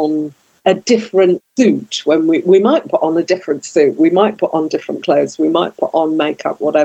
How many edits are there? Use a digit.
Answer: 1